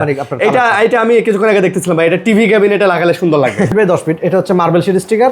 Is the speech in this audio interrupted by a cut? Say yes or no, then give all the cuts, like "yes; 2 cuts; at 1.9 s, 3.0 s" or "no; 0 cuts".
yes; 1 cut; at 3.7 s